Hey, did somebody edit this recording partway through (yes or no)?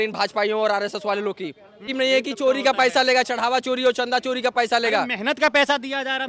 yes